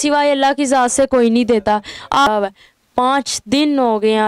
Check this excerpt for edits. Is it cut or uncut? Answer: cut